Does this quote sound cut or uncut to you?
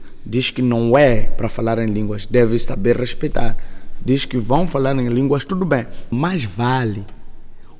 cut